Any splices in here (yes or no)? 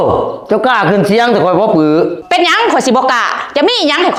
no